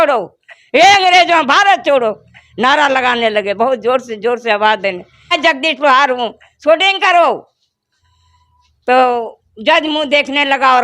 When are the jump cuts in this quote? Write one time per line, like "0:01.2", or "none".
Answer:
0:05.3